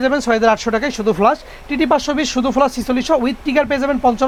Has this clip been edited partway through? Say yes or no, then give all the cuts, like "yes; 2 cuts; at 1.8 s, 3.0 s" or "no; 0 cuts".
no; 0 cuts